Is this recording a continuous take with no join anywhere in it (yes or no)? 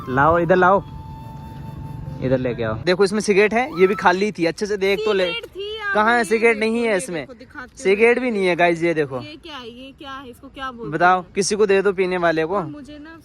no